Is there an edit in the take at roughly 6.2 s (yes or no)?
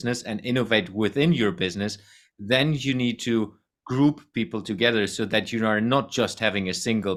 no